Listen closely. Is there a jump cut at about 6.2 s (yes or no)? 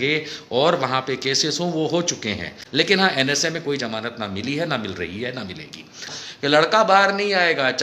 yes